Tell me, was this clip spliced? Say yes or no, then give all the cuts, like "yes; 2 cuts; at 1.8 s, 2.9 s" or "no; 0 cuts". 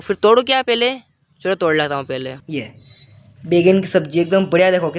yes; 1 cut; at 2.4 s